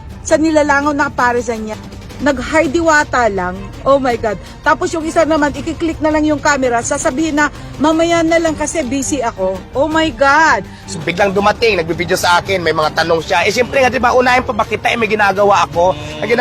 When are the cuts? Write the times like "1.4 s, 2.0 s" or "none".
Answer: 1.7 s, 11.0 s

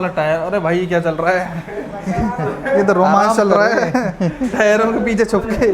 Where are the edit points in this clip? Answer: none

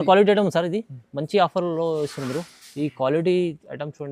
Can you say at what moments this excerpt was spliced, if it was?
none

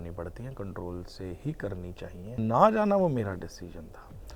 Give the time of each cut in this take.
2.4 s

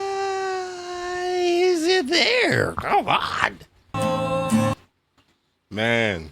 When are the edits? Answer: 3.9 s

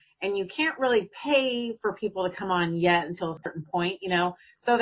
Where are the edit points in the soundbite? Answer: 3.5 s

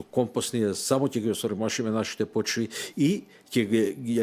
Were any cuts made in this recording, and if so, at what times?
none

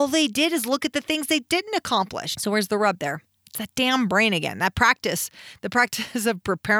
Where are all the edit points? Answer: 2.3 s

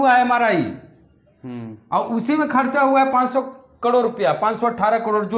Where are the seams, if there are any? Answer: none

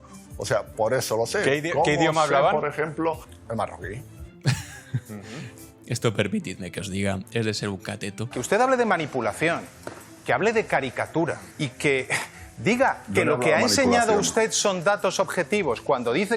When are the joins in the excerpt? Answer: 3.3 s, 8.4 s, 11.5 s

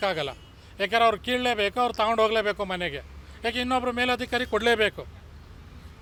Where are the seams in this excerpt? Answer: none

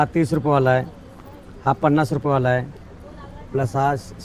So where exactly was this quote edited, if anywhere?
none

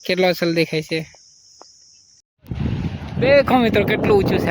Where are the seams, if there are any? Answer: 2.4 s

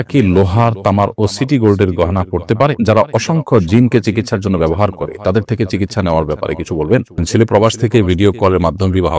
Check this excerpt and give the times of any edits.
2.8 s, 7.2 s

